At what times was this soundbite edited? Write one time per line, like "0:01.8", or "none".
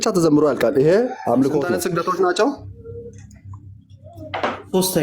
0:01.7